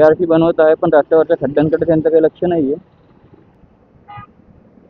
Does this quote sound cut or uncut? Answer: cut